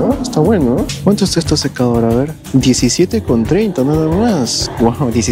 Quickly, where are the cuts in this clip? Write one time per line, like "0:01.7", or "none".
0:00.9